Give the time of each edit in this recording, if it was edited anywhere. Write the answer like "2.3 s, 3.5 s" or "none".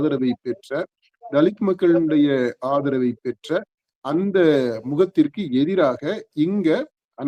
none